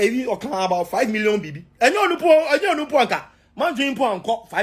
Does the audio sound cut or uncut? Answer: uncut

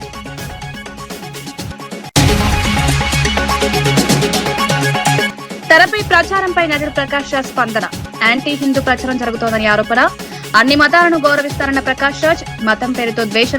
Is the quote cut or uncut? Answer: cut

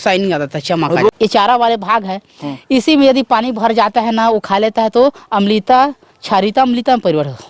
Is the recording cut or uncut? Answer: cut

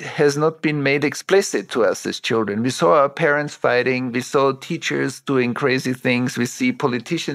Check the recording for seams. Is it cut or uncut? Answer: uncut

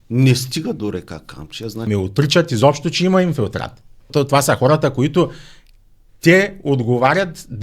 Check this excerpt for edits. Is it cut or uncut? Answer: cut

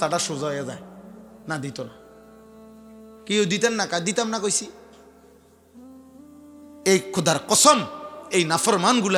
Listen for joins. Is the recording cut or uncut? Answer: uncut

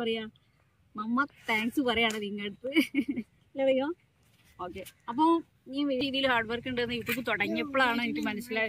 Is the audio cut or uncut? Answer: cut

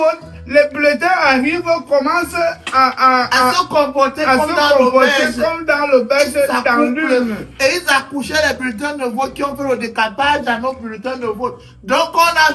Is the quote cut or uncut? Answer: uncut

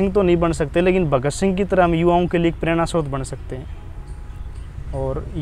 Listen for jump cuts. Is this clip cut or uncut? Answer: uncut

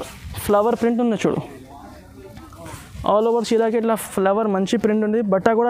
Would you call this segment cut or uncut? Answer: uncut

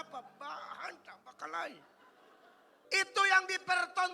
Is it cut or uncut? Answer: cut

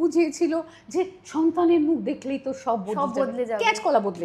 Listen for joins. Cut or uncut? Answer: uncut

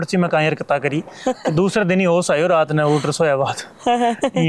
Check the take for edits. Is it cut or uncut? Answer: uncut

